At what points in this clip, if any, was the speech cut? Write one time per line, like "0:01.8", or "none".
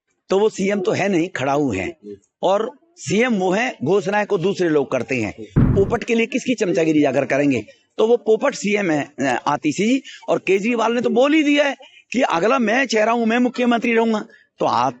0:05.7